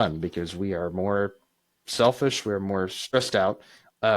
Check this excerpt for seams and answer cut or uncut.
cut